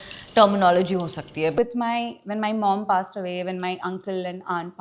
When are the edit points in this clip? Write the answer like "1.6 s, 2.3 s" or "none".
1.5 s